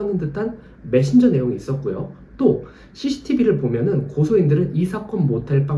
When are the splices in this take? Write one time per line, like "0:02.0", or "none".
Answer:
none